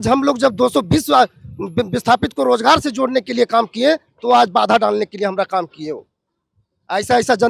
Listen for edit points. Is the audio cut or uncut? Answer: uncut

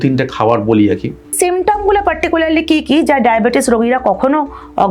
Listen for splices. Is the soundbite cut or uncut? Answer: cut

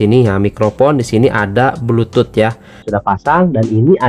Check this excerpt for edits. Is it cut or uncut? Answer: cut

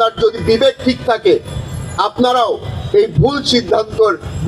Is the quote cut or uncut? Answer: uncut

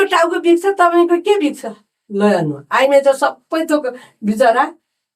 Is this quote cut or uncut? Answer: uncut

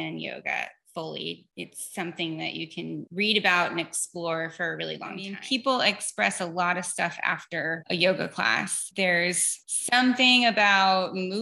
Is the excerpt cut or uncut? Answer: cut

